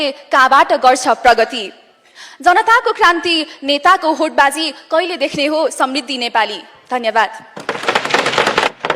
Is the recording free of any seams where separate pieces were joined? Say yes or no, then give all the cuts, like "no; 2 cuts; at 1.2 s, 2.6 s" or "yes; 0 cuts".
yes; 0 cuts